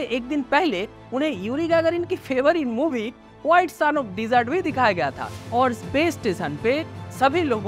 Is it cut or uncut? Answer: cut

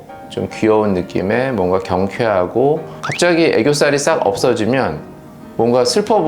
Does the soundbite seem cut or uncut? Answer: cut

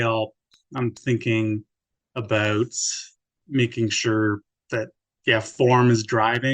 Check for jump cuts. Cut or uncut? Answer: cut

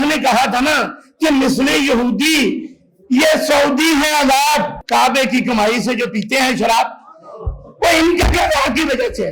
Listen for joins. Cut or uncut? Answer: cut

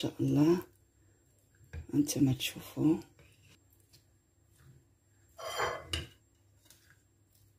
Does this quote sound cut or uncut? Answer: cut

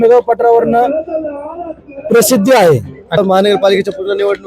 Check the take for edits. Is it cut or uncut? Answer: cut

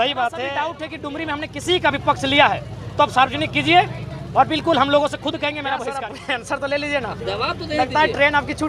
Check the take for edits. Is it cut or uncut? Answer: cut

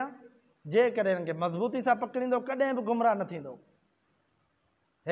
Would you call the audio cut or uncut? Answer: uncut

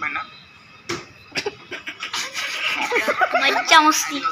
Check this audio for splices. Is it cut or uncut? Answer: cut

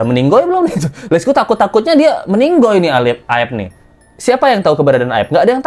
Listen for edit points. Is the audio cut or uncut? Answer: uncut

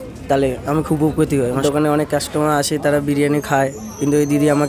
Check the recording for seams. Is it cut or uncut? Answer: cut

